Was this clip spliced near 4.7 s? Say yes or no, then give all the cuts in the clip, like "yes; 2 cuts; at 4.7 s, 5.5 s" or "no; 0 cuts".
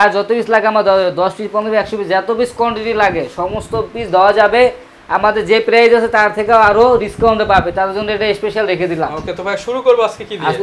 no; 0 cuts